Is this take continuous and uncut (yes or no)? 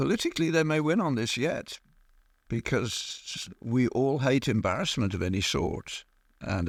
yes